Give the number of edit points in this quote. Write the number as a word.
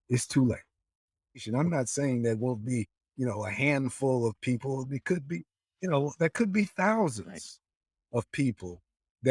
one